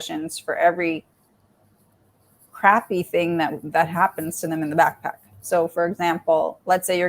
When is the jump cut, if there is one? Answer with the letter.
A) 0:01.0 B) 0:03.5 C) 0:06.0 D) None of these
D